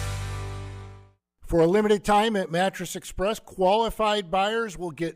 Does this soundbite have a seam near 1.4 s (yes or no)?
yes